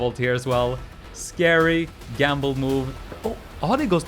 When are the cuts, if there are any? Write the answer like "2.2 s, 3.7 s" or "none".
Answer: 3.2 s